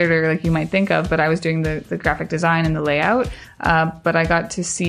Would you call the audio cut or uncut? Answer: uncut